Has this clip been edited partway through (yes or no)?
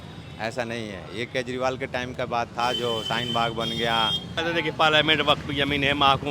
yes